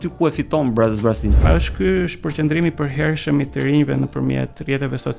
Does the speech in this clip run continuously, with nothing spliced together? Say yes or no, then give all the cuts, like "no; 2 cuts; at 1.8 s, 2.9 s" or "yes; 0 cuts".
no; 1 cut; at 1.4 s